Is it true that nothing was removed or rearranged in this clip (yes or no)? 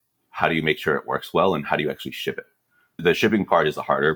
no